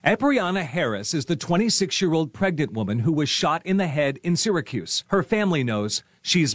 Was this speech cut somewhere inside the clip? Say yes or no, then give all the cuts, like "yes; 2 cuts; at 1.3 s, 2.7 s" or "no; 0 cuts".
no; 0 cuts